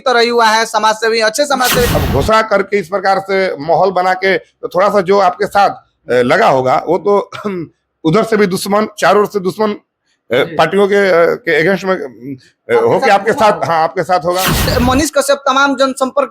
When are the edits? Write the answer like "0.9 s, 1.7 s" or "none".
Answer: 1.9 s, 14.7 s